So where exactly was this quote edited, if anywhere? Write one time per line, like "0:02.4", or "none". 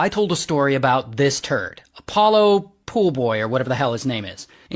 none